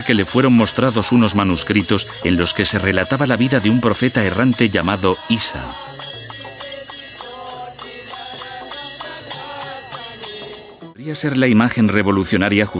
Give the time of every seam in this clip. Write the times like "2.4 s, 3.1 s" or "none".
11.2 s